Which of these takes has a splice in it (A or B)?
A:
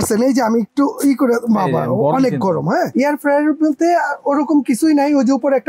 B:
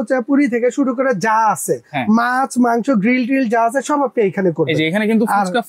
A